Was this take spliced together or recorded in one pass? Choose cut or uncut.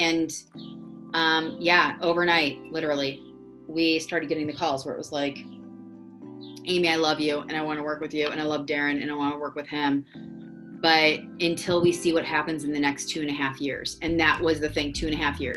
uncut